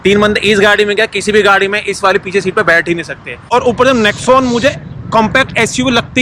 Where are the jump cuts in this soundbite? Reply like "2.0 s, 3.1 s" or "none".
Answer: 3.3 s